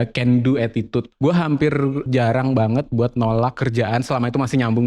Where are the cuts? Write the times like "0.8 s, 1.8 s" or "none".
1.1 s, 2.1 s, 3.6 s